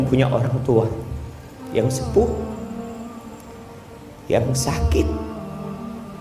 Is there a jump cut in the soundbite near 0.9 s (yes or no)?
no